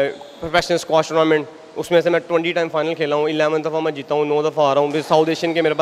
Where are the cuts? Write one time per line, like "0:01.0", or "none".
none